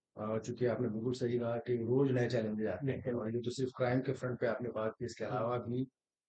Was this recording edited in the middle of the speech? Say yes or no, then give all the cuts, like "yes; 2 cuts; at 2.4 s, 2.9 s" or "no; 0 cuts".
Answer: no; 0 cuts